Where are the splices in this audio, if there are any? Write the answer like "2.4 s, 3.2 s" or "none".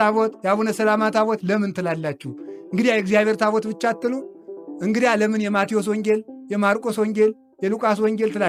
none